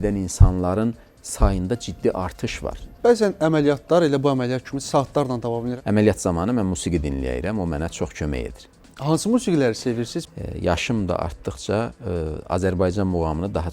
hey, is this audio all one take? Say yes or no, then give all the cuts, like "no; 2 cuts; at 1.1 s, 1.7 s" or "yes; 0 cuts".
no; 3 cuts; at 2.8 s, 5.7 s, 10.2 s